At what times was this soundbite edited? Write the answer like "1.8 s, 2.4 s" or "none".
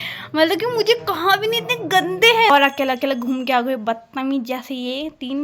2.5 s